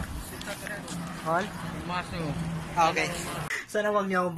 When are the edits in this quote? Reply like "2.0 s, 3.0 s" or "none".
3.5 s